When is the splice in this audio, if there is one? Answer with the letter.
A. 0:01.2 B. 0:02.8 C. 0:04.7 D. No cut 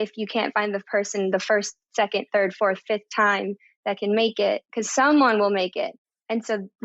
B